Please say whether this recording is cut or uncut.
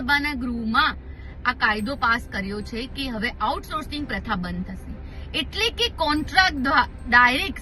uncut